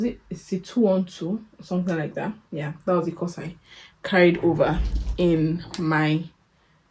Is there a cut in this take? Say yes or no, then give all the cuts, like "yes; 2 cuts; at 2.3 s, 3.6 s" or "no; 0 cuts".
no; 0 cuts